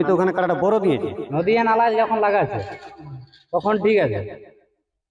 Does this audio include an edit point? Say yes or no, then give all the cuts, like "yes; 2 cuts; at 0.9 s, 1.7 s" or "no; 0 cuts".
yes; 1 cut; at 1.2 s